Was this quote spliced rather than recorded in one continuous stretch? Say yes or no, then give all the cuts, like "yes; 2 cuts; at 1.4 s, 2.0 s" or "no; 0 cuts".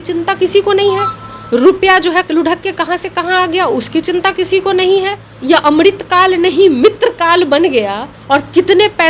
yes; 1 cut; at 5.2 s